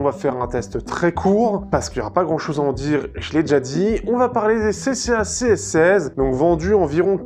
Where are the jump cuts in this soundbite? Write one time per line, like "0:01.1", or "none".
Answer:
0:01.6
0:06.1